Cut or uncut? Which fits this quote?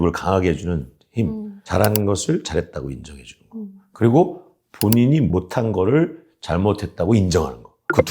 cut